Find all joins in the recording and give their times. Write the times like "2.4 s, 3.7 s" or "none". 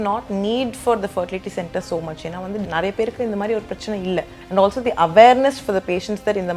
2.6 s, 4.4 s